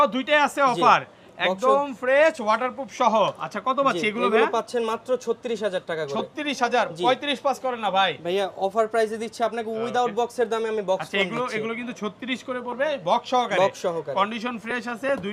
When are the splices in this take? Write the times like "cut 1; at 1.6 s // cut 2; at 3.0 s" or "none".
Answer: none